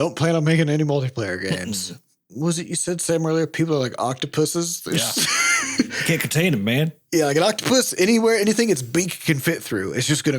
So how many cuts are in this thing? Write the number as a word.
two